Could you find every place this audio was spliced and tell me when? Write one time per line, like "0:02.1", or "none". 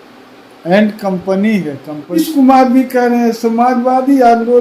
0:02.2